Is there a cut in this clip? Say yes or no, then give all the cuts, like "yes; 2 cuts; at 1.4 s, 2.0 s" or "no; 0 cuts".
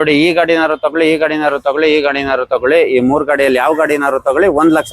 no; 0 cuts